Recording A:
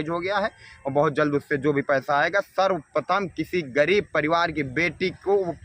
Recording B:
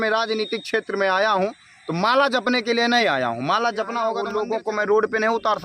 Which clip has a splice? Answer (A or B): B